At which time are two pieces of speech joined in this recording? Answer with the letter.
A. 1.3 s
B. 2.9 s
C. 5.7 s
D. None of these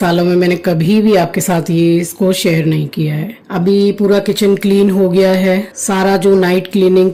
D